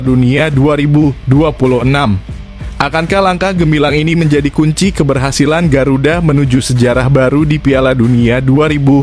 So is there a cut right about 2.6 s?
no; 0 cuts

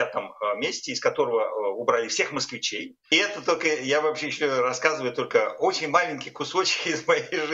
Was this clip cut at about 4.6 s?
no; 1 cut; at 3.1 s

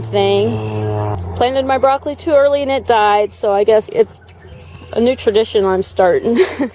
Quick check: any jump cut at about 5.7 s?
no; 2 cuts; at 1.1 s, 3.9 s

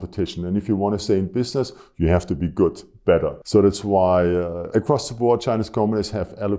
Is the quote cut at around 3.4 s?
yes; 2 cuts; at 3.4 s, 4.6 s

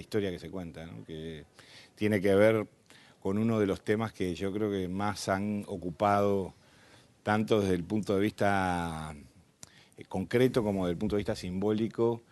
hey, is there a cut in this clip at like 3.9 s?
no; 1 cut; at 6.8 s

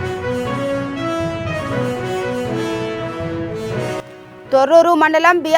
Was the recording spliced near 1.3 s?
no; 1 cut; at 4.0 s

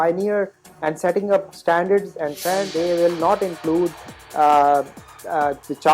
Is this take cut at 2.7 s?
yes; 1 cut; at 2.7 s

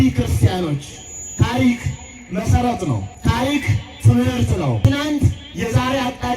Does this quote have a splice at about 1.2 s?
no; 2 cuts; at 3.1 s, 4.8 s

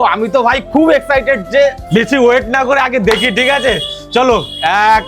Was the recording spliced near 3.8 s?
no; 1 cut; at 1.8 s

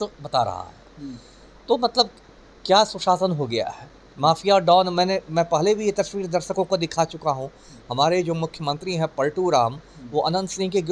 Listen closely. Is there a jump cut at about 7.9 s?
no; 0 cuts

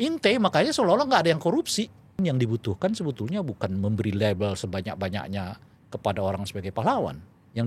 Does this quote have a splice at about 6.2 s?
no; 1 cut; at 2.2 s

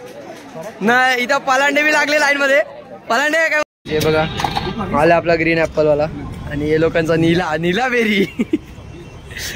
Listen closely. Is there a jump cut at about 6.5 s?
no; 1 cut; at 3.6 s

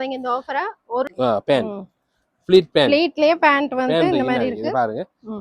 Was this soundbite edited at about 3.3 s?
no; 1 cut; at 1.1 s

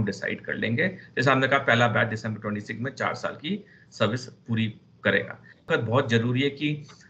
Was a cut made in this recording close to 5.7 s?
yes; 1 cut; at 5.7 s

